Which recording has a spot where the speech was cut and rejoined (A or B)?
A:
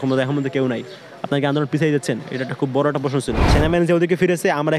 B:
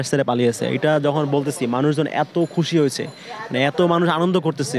A